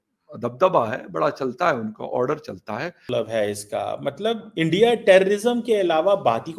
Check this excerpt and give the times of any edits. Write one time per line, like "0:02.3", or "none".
0:03.1